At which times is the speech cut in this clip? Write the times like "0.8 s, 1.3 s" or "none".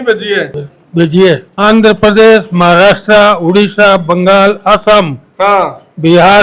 none